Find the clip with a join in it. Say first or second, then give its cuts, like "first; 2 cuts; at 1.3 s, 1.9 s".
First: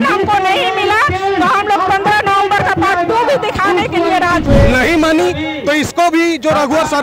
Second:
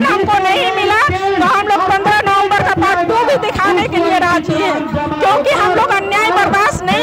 first; 1 cut; at 4.5 s